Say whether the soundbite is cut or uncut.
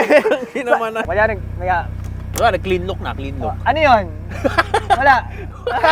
cut